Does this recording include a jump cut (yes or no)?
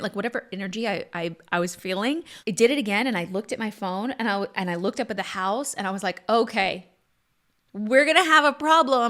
yes